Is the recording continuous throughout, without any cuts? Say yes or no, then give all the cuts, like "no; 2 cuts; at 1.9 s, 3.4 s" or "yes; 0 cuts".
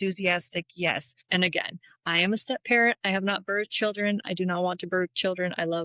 no; 1 cut; at 1.2 s